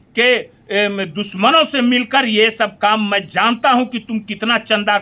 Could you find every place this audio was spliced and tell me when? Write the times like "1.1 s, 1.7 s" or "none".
none